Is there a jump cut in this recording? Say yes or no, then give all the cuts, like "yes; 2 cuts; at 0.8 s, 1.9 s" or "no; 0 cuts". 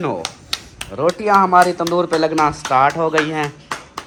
no; 0 cuts